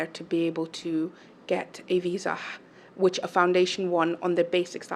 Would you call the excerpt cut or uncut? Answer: uncut